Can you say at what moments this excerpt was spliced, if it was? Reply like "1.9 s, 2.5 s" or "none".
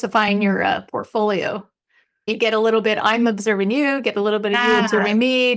2.3 s